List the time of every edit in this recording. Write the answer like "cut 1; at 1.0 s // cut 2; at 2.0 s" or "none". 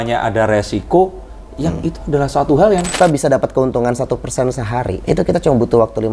cut 1; at 3.0 s // cut 2; at 5.0 s